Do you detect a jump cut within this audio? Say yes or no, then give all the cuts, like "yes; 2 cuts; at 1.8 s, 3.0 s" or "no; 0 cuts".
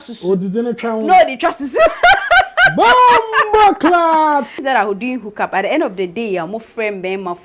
yes; 1 cut; at 4.6 s